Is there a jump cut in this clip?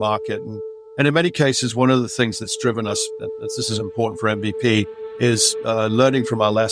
no; 0 cuts

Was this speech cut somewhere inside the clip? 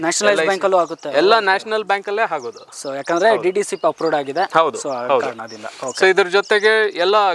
no; 0 cuts

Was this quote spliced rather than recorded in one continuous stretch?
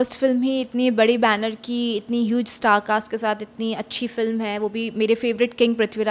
no; 0 cuts

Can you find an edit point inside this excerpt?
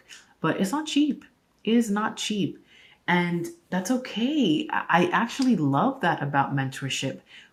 no; 0 cuts

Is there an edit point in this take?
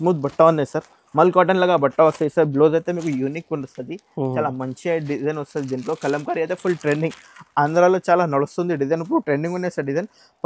no; 0 cuts

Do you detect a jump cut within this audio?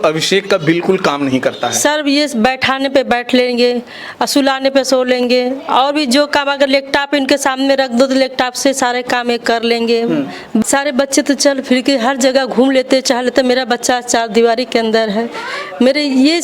yes; 1 cut; at 10.6 s

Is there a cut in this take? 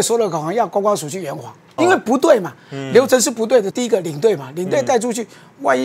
yes; 2 cuts; at 1.8 s, 3.7 s

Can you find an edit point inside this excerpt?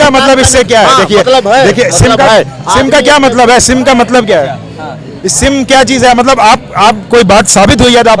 no; 0 cuts

